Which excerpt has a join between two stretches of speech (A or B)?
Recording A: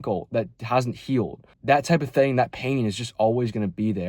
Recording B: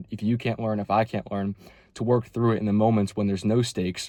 A